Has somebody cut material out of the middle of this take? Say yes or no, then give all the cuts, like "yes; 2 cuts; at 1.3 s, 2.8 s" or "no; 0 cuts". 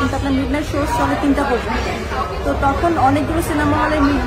no; 0 cuts